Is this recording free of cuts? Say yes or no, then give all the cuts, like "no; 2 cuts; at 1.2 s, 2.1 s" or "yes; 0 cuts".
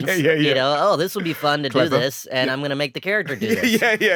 yes; 0 cuts